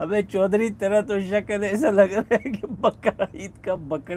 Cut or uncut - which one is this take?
uncut